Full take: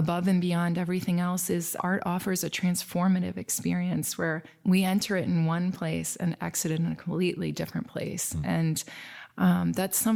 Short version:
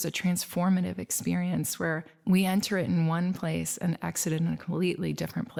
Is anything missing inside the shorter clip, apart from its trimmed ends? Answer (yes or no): no